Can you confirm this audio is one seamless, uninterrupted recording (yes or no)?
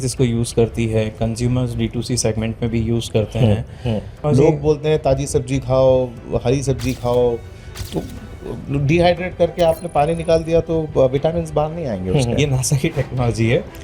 no